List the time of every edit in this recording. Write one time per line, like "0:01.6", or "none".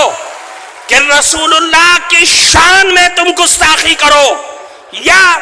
none

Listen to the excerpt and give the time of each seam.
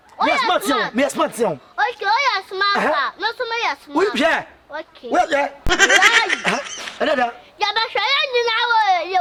none

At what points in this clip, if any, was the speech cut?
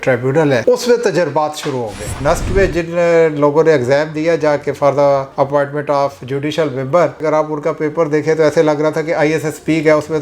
0:02.2
0:07.2

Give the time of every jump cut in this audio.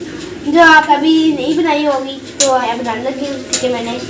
0:01.0
0:02.6

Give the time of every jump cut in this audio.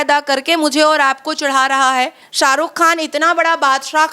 0:02.2

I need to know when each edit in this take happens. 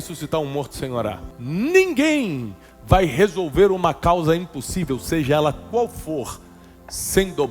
0:01.3

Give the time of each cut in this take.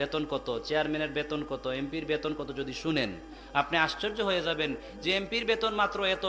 none

